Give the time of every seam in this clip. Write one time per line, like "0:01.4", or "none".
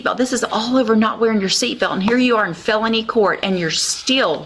none